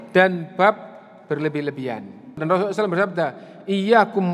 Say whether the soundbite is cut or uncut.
cut